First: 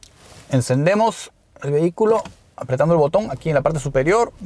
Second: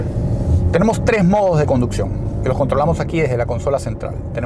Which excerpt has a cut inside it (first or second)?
first